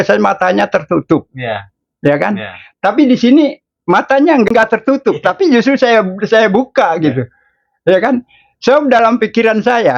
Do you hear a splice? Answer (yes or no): yes